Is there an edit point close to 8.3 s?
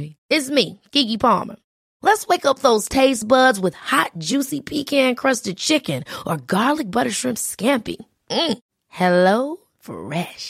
no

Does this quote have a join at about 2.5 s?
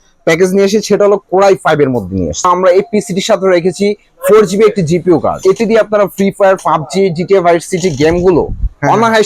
yes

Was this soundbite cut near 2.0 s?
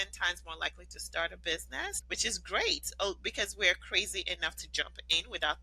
yes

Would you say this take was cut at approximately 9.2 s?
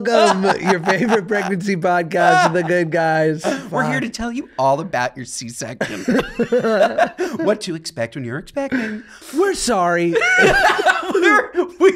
yes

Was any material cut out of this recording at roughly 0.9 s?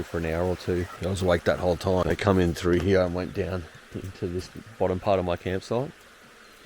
yes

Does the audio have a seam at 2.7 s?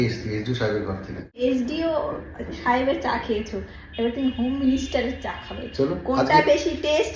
no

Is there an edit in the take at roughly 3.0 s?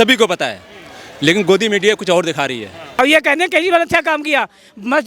yes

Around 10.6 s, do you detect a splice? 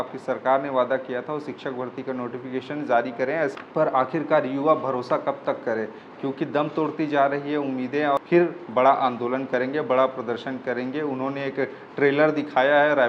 no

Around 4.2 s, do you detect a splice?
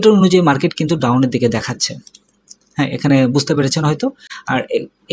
no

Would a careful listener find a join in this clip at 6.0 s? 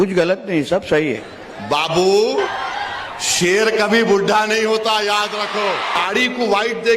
yes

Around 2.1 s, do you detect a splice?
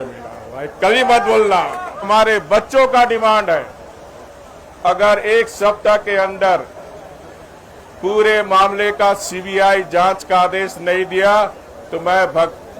yes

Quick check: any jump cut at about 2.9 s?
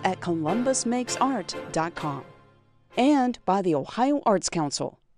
no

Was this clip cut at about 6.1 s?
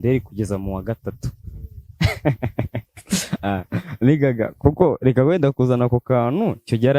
no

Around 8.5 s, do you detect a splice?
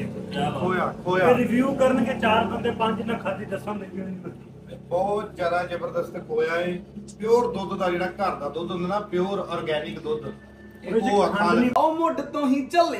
no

